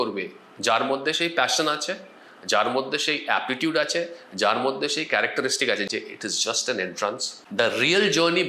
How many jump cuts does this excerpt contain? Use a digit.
2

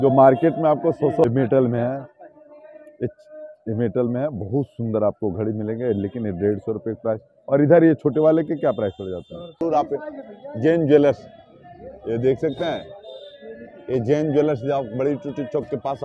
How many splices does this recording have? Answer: 2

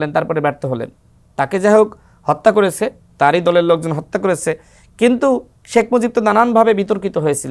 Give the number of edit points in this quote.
0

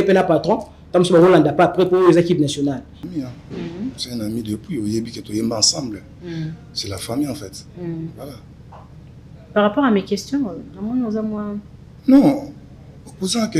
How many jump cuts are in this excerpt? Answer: 1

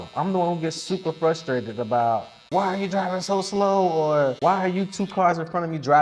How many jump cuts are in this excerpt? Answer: 2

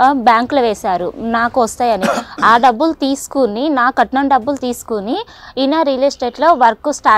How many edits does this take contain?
0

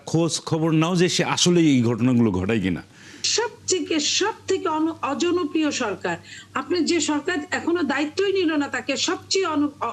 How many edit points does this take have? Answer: 1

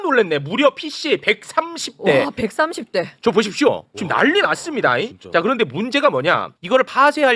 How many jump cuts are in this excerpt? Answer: 0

